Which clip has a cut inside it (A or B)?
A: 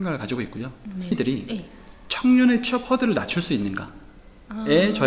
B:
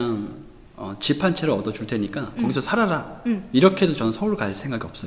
A